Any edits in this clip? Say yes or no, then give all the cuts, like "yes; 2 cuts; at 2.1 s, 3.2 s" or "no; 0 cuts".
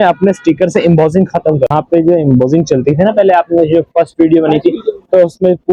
no; 0 cuts